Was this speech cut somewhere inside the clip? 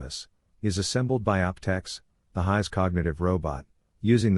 yes; 1 cut; at 3.2 s

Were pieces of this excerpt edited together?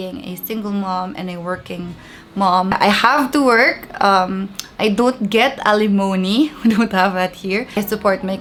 no; 0 cuts

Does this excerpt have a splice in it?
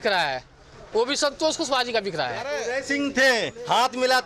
yes; 1 cut; at 2.6 s

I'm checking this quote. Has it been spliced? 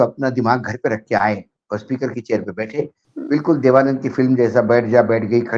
yes; 1 cut; at 3.0 s

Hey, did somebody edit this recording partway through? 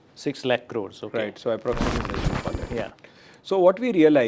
yes; 1 cut; at 2.1 s

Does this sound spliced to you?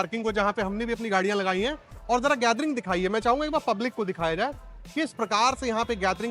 no; 0 cuts

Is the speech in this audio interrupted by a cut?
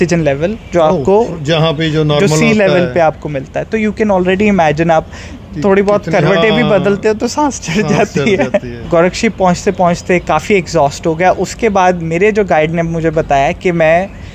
yes; 1 cut; at 8.8 s

